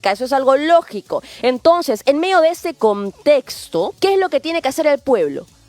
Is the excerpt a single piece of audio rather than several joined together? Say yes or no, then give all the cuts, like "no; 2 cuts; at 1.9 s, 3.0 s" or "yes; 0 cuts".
no; 1 cut; at 3.9 s